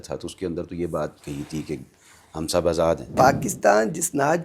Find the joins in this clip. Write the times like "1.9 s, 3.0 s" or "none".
3.2 s